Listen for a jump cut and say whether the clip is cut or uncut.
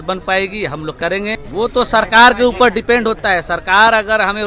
cut